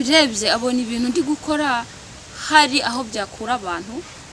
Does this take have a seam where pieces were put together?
no; 0 cuts

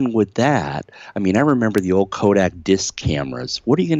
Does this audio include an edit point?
no; 0 cuts

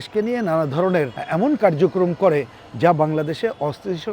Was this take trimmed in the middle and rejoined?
yes; 1 cut; at 1.2 s

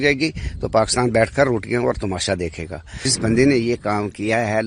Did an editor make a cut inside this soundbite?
yes; 1 cut; at 3.0 s

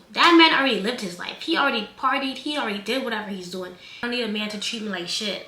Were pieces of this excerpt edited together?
yes; 1 cut; at 4.0 s

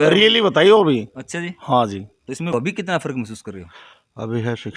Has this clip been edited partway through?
yes; 1 cut; at 2.5 s

